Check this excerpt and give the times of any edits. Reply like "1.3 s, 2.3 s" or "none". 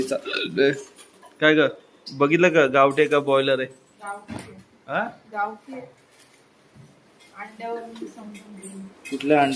none